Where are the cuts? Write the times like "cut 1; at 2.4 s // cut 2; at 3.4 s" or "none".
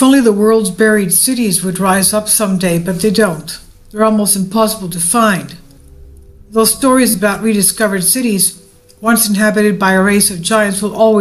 cut 1; at 4.7 s